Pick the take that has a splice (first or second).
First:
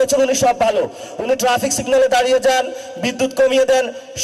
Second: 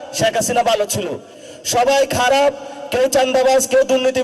second